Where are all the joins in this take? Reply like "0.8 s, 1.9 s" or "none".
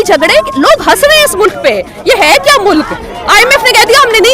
none